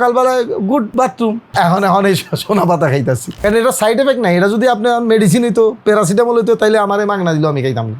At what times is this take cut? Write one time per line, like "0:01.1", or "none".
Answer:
0:03.3